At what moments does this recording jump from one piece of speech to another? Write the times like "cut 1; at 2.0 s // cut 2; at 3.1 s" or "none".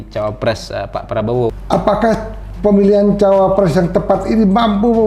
cut 1; at 1.6 s

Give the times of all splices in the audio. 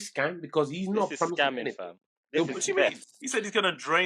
none

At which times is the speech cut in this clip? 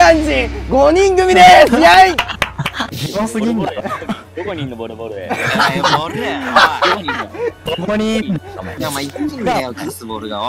cut 1; at 2.8 s

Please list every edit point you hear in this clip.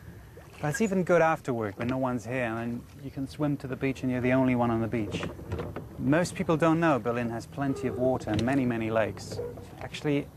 none

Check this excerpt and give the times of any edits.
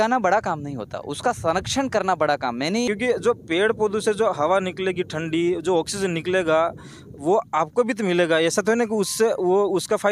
cut 1; at 2.9 s

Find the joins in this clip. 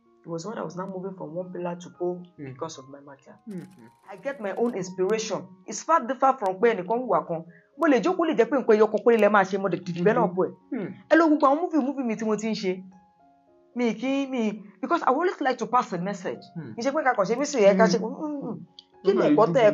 cut 1; at 4.2 s

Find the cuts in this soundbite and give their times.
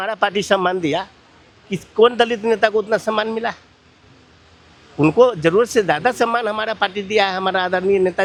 none

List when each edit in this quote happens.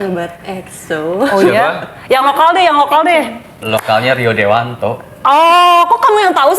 cut 1; at 3.6 s

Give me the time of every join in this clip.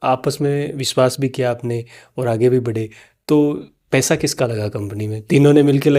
none

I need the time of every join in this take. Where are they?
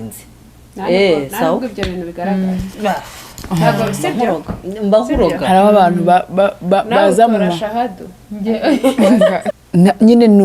cut 1; at 9.5 s

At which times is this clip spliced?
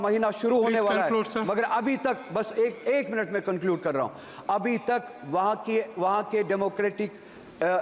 none

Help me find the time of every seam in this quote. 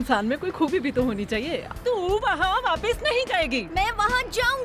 cut 1; at 1.6 s

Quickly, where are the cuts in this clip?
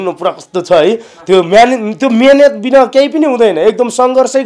none

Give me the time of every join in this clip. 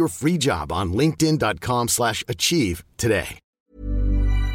cut 1; at 3.4 s

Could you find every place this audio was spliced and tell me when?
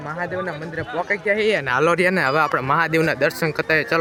none

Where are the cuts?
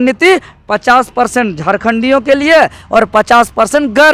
none

